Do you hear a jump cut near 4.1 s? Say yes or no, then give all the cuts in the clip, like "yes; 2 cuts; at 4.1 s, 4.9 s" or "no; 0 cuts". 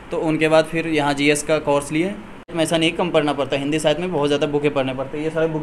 no; 1 cut; at 2.5 s